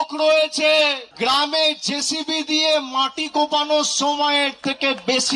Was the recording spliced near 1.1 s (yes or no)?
yes